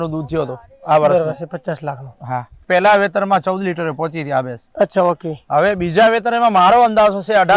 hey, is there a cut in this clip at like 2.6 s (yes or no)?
yes